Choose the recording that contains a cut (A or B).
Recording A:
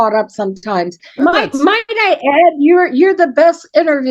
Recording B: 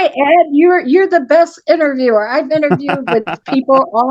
A